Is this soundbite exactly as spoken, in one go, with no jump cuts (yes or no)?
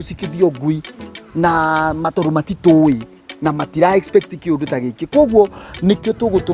yes